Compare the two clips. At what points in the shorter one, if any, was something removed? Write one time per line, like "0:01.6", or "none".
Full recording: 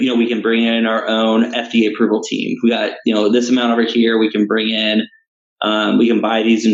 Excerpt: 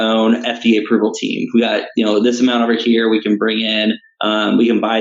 0:04.1